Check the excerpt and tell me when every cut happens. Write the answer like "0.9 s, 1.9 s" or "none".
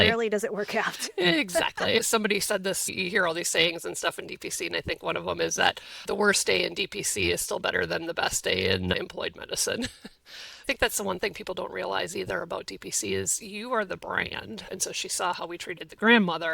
2.0 s, 10.7 s, 14.7 s